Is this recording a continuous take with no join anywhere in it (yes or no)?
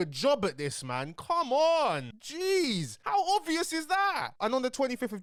yes